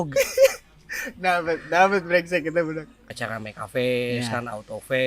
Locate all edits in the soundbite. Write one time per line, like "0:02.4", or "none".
0:02.9